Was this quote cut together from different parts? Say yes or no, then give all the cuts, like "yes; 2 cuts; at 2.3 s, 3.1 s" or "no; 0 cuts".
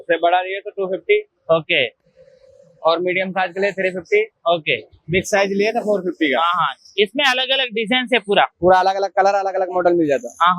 no; 0 cuts